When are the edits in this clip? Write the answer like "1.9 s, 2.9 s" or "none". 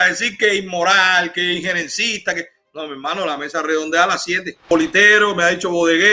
4.7 s